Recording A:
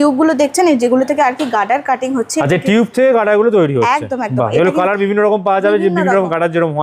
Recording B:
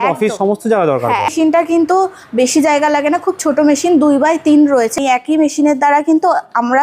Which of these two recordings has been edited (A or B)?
B